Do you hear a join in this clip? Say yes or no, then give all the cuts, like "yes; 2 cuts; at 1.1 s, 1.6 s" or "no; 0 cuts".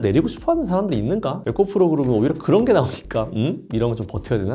yes; 1 cut; at 1.4 s